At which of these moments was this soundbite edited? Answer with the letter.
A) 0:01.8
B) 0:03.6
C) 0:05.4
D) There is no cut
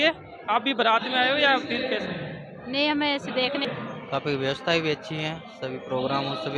B